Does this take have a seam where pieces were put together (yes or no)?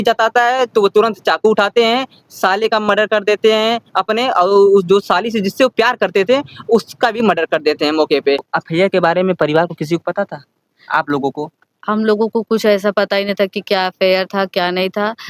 yes